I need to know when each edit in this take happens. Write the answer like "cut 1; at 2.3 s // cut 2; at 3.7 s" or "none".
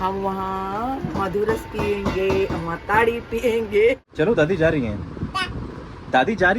cut 1; at 4.0 s

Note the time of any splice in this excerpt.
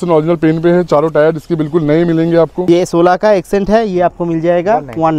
cut 1; at 2.6 s

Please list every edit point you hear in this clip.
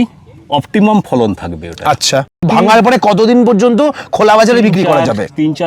cut 1; at 2.4 s

